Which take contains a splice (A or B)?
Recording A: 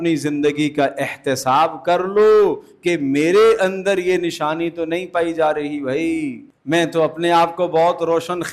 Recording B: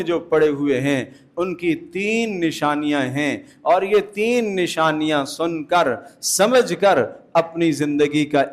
A